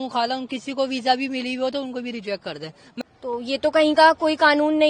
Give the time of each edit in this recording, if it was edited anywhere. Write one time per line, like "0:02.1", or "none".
0:03.0